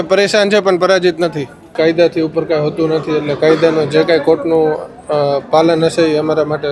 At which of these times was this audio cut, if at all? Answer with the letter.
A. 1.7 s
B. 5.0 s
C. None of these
A